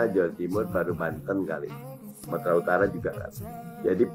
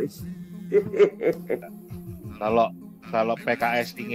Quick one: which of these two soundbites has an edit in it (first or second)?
second